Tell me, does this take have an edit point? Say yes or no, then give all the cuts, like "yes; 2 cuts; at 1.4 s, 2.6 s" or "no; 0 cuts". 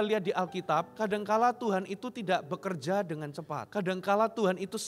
yes; 2 cuts; at 0.9 s, 3.6 s